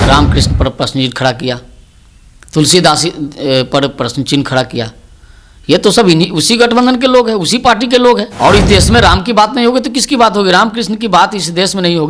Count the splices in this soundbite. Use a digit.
1